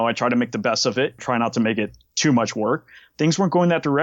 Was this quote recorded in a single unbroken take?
no; 2 cuts; at 1.2 s, 3.0 s

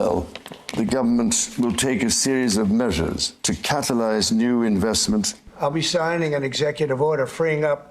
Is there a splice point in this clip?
yes; 2 cuts; at 3.3 s, 5.4 s

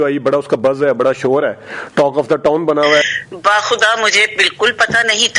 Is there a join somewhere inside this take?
yes; 1 cut; at 3.1 s

